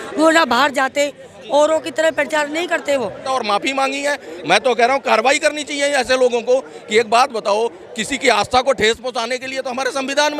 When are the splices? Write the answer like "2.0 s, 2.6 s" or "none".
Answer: 3.3 s